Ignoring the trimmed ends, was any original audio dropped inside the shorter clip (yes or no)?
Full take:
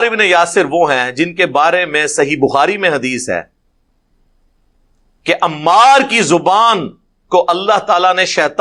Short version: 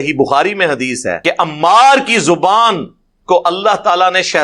yes